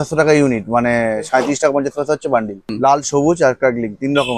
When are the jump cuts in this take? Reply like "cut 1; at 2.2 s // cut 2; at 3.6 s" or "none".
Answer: cut 1; at 2.7 s